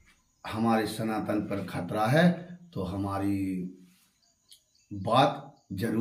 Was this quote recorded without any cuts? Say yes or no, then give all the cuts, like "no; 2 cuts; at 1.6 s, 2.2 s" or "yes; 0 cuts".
yes; 0 cuts